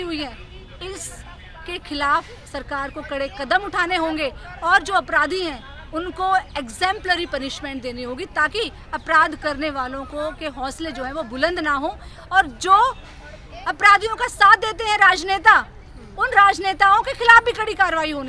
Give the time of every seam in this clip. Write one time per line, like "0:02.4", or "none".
none